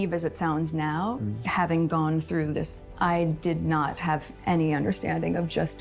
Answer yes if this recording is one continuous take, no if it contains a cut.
no